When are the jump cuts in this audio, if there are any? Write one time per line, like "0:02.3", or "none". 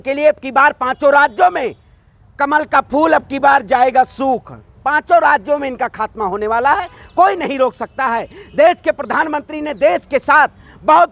none